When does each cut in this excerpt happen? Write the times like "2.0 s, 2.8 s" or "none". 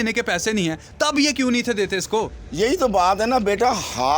none